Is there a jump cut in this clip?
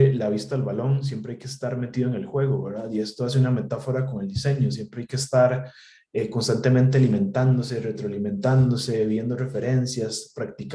no; 0 cuts

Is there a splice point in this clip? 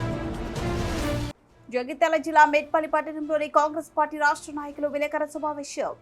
yes; 1 cut; at 1.3 s

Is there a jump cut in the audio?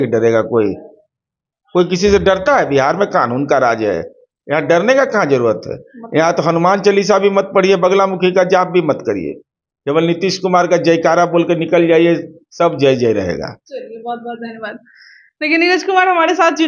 no; 0 cuts

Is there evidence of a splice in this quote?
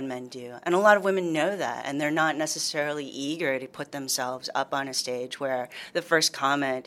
no; 0 cuts

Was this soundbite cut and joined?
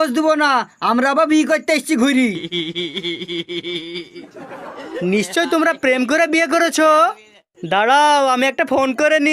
no; 0 cuts

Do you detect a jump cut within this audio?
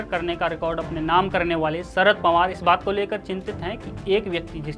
no; 0 cuts

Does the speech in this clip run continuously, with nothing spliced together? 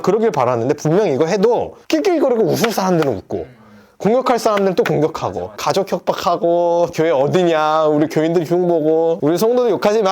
no; 2 cuts; at 5.6 s, 6.9 s

